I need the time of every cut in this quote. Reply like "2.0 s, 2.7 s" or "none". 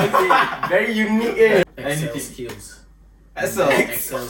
1.6 s